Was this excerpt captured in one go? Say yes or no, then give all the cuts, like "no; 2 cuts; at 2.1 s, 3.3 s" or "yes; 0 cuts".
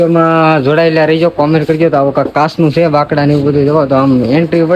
yes; 0 cuts